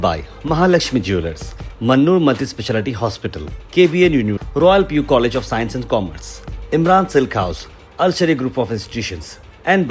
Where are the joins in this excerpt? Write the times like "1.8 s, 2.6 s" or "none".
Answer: none